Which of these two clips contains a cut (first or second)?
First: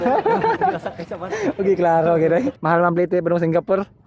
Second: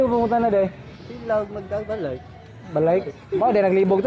first